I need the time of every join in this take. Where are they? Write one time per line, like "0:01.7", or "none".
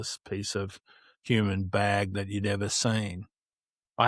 none